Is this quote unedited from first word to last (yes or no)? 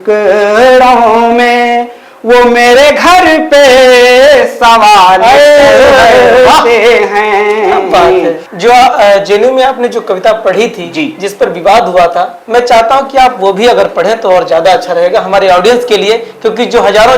no